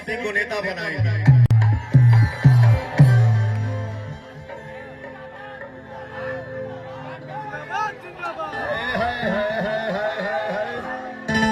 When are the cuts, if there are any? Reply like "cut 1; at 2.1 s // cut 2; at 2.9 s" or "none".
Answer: none